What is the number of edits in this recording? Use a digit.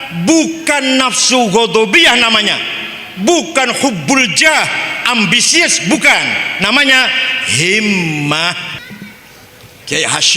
1